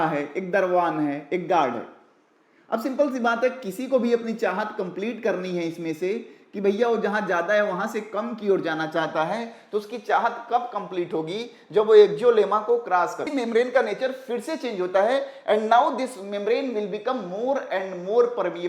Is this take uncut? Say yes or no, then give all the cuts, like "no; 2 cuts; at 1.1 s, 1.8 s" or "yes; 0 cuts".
no; 1 cut; at 13.3 s